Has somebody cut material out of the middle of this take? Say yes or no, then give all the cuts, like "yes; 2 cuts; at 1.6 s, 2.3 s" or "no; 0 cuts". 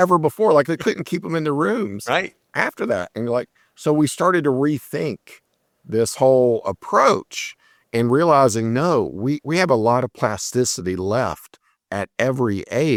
no; 0 cuts